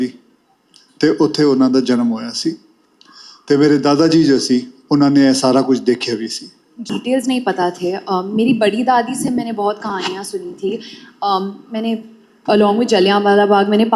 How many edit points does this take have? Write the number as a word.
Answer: one